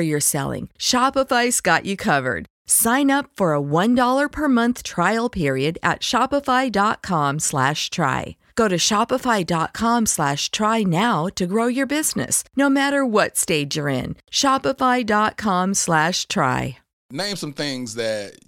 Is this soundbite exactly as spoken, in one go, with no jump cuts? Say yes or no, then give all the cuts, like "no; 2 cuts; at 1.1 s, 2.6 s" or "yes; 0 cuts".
no; 1 cut; at 16.9 s